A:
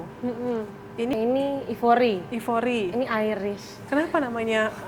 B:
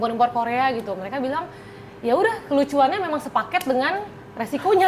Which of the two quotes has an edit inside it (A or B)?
A